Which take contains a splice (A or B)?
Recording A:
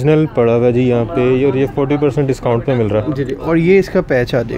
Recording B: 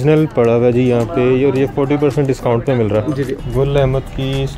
B